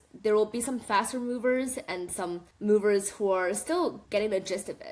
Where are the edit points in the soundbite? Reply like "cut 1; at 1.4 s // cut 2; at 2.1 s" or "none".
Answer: cut 1; at 2.5 s // cut 2; at 4.0 s